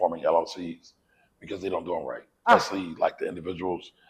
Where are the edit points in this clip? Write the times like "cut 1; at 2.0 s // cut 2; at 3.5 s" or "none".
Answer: cut 1; at 2.5 s